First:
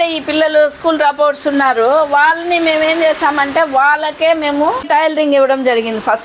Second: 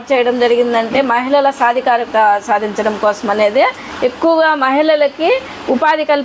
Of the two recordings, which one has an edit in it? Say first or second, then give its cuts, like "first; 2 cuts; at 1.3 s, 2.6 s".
second; 2 cuts; at 2.1 s, 3.8 s